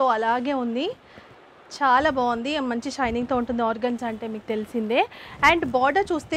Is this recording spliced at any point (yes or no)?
no